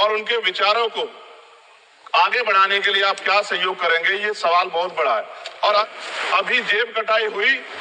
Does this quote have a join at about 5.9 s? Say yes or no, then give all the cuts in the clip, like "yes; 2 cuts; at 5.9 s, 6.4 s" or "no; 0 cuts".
yes; 1 cut; at 5.9 s